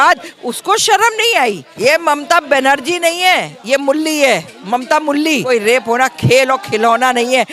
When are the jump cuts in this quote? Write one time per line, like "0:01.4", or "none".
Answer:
0:01.7
0:05.4

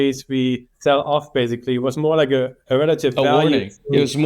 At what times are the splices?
0:02.6

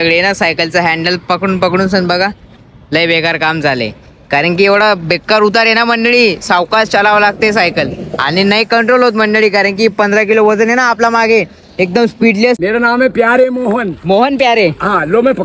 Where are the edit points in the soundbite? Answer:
0:12.6

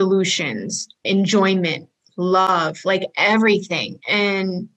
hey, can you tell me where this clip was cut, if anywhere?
0:01.0
0:02.5

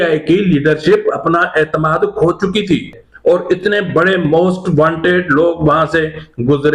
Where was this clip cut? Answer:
0:03.1

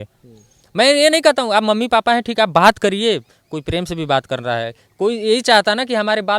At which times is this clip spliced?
none

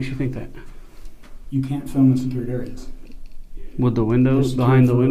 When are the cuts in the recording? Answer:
none

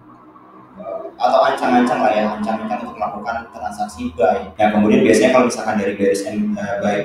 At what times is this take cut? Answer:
0:04.5

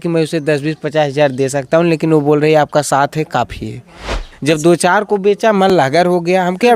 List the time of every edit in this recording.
0:04.3

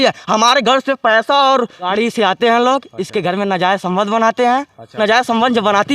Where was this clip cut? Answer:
0:01.9
0:05.0

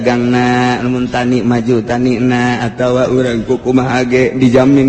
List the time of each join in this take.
none

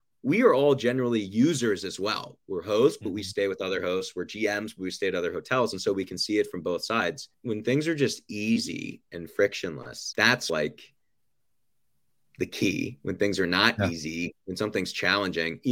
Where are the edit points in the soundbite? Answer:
0:07.3
0:10.4

